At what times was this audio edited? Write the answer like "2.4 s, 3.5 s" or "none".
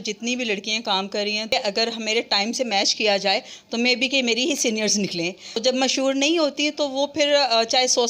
1.5 s, 5.6 s